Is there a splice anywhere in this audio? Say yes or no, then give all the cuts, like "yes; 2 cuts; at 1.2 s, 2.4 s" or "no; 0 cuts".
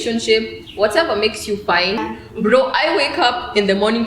yes; 1 cut; at 2.0 s